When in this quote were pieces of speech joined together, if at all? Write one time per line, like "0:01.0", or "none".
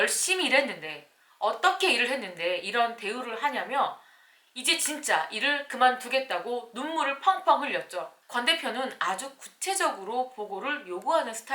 0:08.2